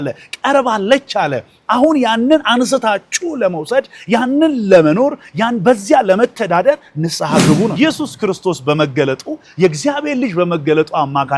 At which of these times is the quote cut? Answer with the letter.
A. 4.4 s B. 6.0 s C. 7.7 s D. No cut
C